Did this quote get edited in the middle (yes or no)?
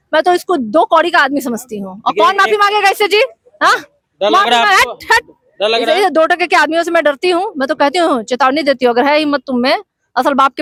no